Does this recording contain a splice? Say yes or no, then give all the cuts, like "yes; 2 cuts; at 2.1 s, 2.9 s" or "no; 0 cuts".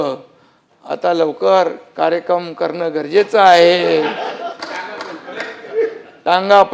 no; 0 cuts